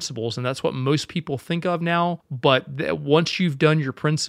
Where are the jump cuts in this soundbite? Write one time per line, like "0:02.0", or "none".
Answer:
0:02.3